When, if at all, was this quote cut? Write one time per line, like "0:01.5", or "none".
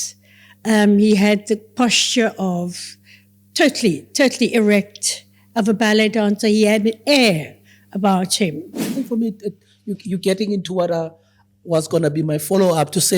0:08.9